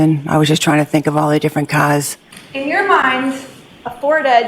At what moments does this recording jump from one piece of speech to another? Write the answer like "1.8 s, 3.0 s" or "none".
2.3 s